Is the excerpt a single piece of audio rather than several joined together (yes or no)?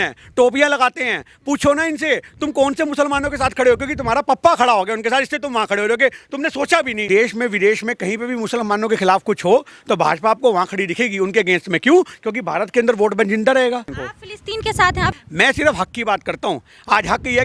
no